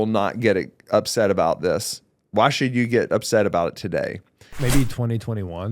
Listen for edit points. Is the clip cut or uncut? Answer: cut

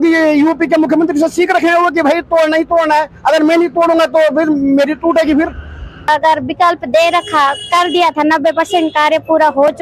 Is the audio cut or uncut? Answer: cut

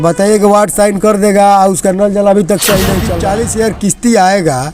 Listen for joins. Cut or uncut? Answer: cut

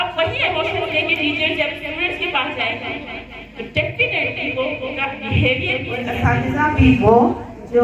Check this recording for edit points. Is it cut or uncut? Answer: cut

